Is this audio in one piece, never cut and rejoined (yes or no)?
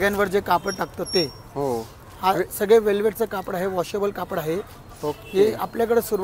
yes